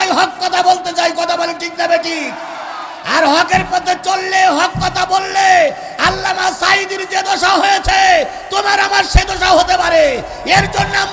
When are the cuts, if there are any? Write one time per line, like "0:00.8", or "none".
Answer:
none